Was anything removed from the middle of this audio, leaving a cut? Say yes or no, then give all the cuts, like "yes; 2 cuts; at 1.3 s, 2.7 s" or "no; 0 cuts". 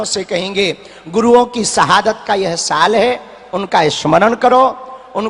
no; 0 cuts